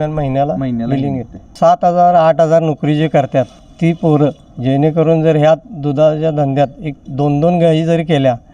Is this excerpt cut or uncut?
cut